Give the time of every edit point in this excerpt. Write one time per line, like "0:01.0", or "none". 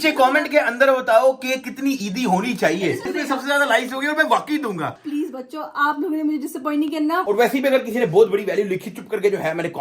0:04.9
0:07.2